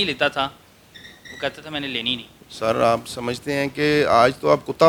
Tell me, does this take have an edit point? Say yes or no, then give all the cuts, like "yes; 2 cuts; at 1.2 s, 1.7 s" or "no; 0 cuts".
no; 0 cuts